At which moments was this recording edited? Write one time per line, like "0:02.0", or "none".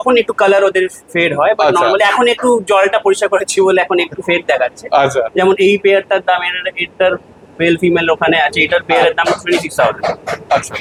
none